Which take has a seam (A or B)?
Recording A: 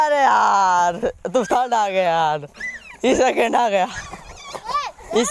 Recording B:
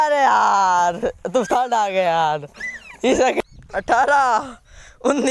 B